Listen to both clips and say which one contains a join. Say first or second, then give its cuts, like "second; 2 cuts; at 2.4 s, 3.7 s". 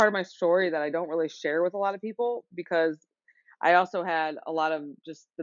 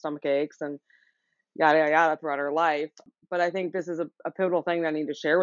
second; 1 cut; at 3.0 s